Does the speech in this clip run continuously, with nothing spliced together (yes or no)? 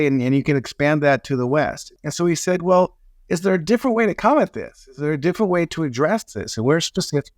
no